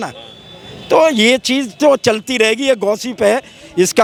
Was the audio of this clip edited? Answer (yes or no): no